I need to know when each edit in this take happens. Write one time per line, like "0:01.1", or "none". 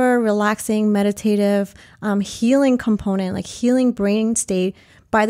none